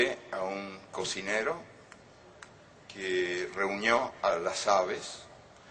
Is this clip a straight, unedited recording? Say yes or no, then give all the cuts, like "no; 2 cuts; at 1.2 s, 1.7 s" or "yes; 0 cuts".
no; 1 cut; at 4.1 s